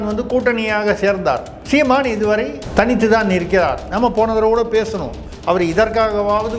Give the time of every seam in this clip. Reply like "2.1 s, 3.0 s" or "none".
1.5 s, 2.6 s